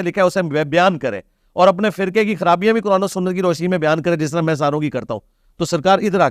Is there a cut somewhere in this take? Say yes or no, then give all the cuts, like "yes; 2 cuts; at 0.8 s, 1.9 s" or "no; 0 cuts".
no; 0 cuts